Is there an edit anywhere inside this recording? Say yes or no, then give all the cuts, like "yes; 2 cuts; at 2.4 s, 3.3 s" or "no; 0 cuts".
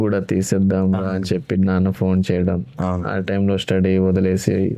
no; 0 cuts